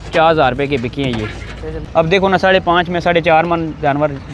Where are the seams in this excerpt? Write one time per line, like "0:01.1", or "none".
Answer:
0:01.8

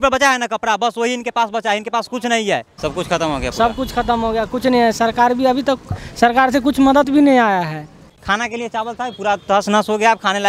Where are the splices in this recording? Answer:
0:02.7
0:08.0

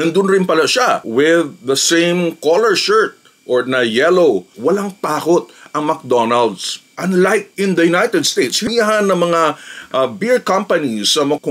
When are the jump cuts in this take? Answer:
0:04.5
0:08.7

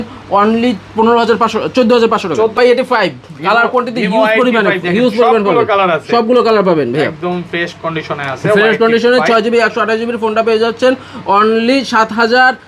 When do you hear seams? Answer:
0:02.6

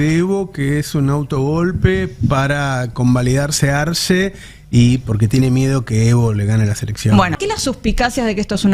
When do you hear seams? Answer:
0:07.4

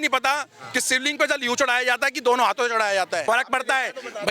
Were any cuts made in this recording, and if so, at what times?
0:03.2

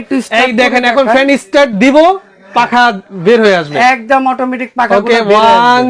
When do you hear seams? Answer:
none

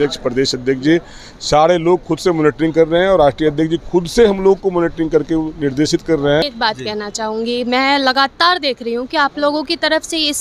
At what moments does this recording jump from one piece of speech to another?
0:06.4

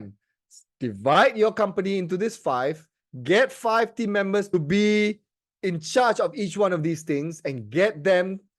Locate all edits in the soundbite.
0:04.5

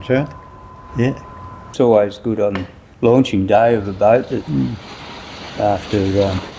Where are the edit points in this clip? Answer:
0:01.7

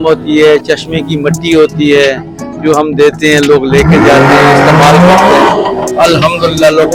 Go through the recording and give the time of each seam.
none

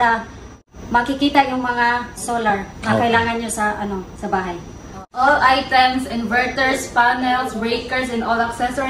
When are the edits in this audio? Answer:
none

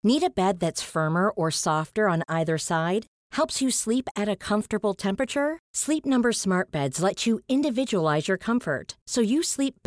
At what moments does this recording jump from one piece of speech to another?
none

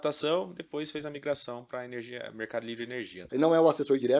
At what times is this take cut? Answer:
0:03.2

